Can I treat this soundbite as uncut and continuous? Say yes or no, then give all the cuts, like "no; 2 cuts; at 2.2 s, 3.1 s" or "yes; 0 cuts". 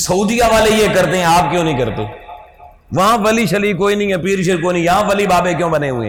yes; 0 cuts